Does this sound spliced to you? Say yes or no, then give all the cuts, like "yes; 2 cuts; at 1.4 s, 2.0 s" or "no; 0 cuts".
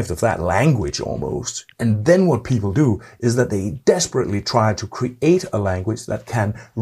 yes; 1 cut; at 1.7 s